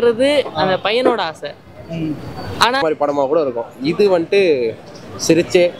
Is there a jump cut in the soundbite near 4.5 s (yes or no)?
no